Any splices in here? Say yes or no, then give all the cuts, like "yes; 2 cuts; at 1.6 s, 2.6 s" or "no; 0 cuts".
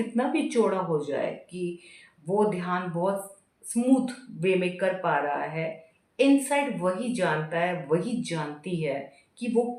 no; 0 cuts